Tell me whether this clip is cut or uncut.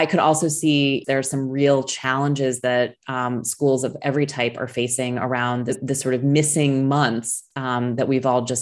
cut